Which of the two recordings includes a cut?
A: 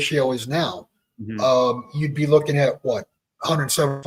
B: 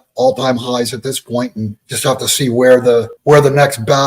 B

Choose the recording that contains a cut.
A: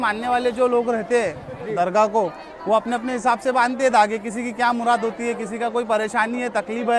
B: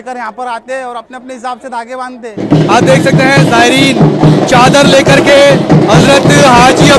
B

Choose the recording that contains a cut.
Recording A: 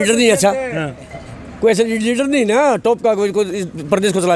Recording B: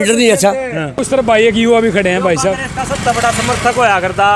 B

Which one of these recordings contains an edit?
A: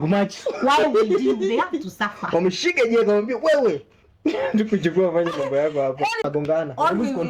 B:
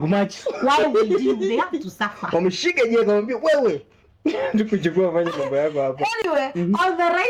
A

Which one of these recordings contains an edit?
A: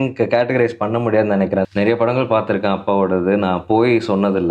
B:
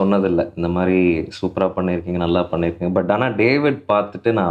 A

